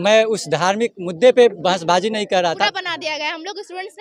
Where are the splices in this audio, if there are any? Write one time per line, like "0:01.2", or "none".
0:02.6